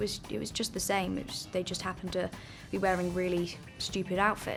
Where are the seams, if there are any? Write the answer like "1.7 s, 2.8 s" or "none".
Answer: none